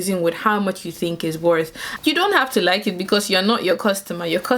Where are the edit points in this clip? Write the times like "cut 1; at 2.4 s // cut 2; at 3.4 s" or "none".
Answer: cut 1; at 1.8 s